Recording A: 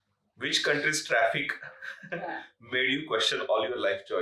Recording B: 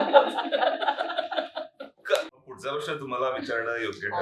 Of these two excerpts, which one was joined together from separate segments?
B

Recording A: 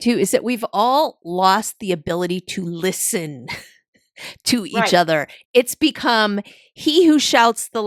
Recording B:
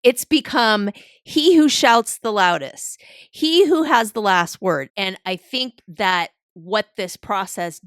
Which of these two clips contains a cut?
B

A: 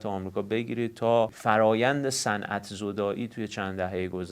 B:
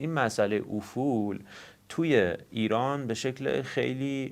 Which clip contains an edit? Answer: A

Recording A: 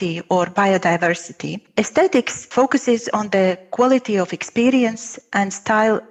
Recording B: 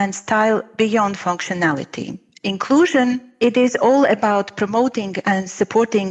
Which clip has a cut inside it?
B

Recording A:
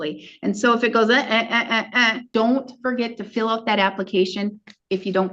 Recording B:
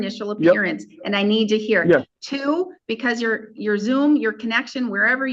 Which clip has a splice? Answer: A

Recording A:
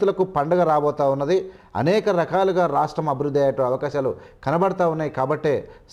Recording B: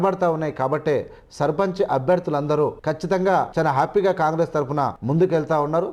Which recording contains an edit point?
B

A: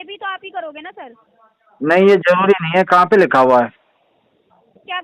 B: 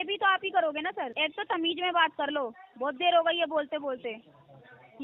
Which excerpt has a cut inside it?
B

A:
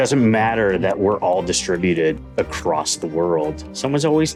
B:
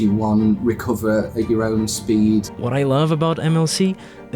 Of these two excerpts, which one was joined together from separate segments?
B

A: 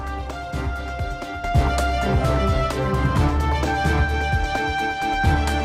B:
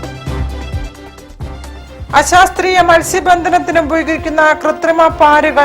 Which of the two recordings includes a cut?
B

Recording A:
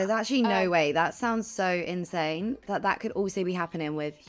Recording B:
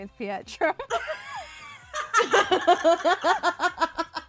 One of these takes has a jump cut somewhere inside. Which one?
A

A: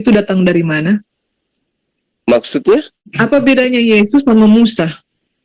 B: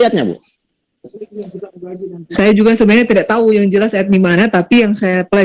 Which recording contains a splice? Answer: A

